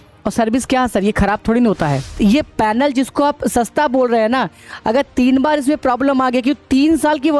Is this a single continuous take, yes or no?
no